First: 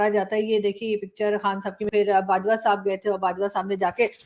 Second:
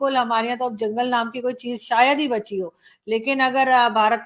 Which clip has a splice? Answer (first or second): first